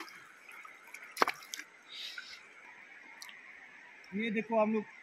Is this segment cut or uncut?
cut